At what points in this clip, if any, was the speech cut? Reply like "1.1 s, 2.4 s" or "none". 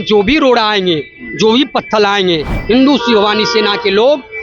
none

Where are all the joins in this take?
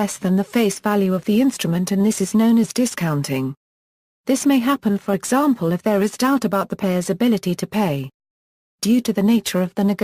none

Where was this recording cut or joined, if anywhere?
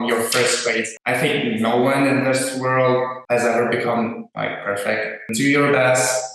0.9 s, 3.2 s, 4.3 s, 5.3 s

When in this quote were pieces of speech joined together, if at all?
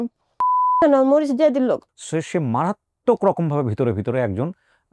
2.0 s

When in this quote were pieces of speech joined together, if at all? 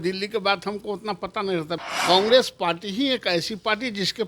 1.8 s

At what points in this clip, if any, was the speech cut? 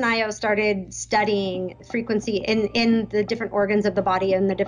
none

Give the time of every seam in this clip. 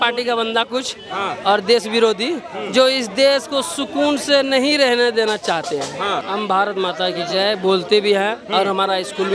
6.3 s

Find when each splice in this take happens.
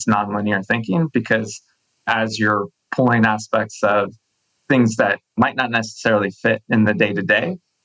none

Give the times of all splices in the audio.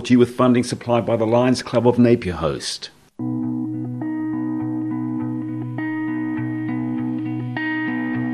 3.2 s

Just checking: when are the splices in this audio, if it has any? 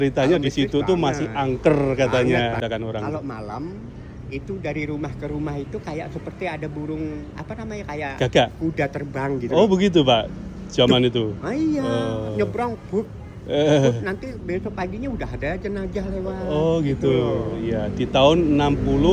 2.6 s

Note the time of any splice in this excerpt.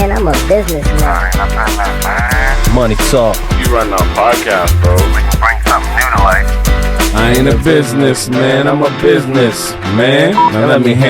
none

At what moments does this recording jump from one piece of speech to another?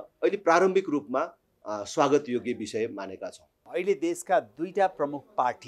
3.7 s

